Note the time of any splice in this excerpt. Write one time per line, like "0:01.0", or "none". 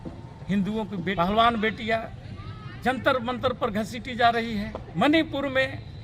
0:01.1
0:04.8